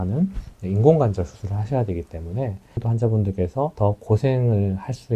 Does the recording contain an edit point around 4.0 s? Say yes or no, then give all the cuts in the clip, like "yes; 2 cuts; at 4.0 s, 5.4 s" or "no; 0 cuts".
no; 1 cut; at 2.8 s